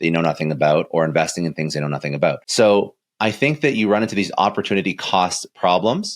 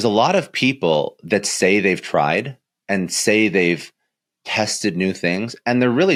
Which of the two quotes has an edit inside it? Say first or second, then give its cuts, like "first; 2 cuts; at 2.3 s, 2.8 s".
first; 1 cut; at 2.4 s